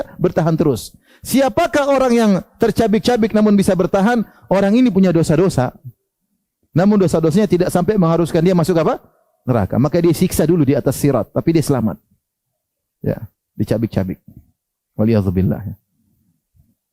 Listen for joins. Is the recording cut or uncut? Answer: uncut